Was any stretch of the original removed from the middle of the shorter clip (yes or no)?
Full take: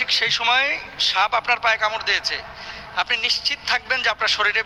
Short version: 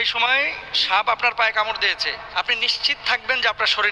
yes